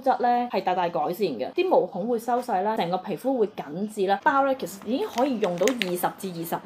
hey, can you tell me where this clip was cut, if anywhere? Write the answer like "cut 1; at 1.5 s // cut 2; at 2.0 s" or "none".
cut 1; at 4.2 s